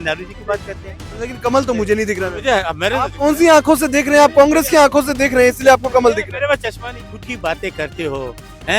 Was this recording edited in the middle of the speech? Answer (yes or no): yes